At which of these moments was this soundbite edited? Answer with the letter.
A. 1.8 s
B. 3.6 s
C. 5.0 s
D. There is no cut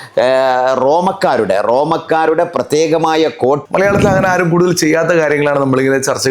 B